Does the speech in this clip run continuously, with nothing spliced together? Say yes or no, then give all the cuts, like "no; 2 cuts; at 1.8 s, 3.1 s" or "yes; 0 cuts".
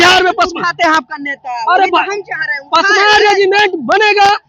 yes; 0 cuts